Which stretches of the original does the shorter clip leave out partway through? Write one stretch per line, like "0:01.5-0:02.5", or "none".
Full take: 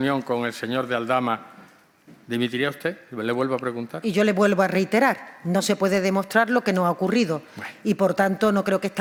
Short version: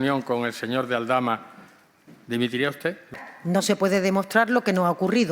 0:03.2-0:05.2